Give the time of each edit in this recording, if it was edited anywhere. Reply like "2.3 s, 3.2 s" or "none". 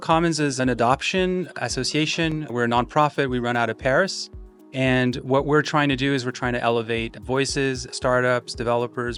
none